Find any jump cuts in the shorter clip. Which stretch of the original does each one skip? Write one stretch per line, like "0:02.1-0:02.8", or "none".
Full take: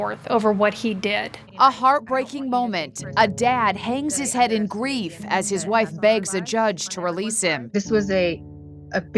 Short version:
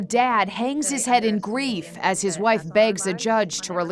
none

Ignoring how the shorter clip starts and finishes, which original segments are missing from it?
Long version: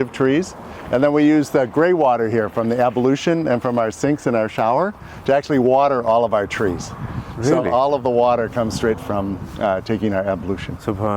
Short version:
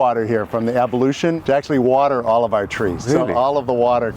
0:03.4-0:05.2
0:06.8-0:07.4

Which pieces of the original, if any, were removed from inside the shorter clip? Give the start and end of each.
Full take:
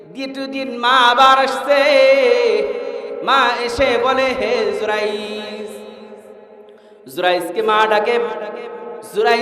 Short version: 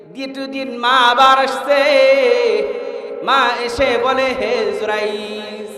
none

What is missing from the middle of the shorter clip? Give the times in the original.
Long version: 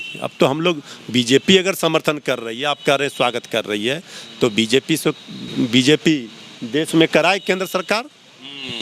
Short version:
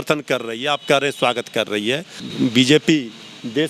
0:04.1-0:05.3

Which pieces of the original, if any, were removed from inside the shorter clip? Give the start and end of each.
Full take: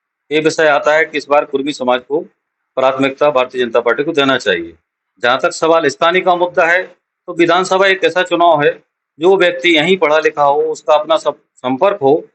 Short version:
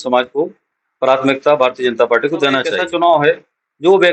0:05.0-0:08.6

